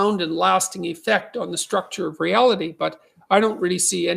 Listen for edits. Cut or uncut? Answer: uncut